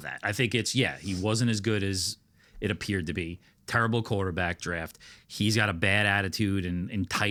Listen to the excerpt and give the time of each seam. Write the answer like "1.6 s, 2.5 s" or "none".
none